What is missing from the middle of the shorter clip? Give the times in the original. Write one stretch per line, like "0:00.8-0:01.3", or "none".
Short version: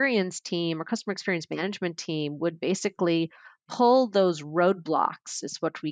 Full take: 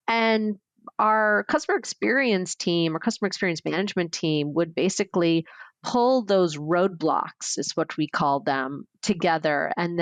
none